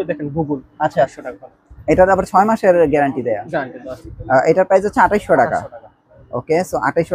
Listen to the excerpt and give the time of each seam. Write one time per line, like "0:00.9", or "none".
0:01.2